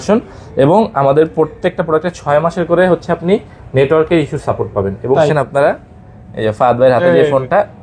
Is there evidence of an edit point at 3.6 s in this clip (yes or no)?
no